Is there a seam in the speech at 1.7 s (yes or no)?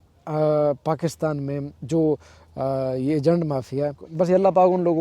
no